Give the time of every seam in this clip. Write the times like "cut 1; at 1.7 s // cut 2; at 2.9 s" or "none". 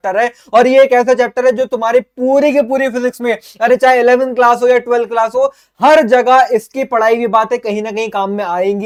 none